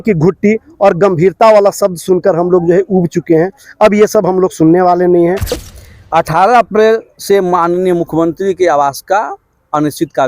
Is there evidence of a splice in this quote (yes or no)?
yes